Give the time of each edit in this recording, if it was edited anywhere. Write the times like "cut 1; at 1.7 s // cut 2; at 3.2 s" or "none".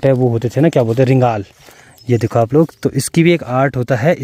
none